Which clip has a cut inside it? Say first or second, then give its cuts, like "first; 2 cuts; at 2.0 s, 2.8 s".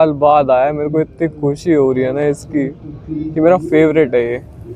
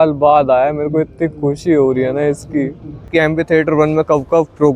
second; 1 cut; at 3.0 s